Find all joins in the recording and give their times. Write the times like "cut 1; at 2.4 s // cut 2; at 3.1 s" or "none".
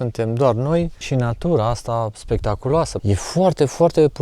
cut 1; at 1.0 s // cut 2; at 3.0 s